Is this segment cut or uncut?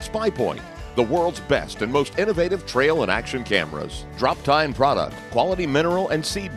uncut